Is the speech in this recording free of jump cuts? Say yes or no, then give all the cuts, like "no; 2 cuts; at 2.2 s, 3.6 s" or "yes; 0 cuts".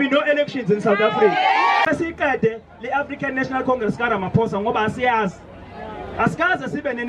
no; 1 cut; at 1.8 s